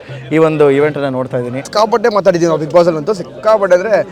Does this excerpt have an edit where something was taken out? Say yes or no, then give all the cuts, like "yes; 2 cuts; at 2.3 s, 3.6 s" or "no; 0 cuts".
yes; 1 cut; at 1.6 s